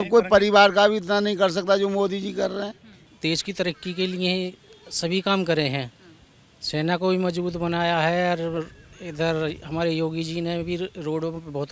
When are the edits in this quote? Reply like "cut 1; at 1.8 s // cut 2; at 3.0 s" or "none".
cut 1; at 3.0 s